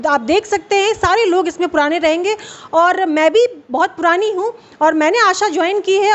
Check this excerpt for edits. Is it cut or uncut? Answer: uncut